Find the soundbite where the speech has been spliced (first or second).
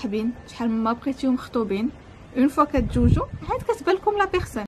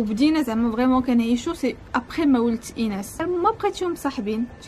second